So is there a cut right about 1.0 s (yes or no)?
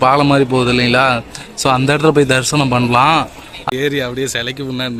no